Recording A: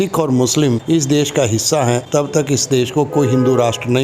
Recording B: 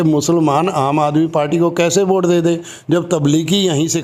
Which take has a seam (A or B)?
A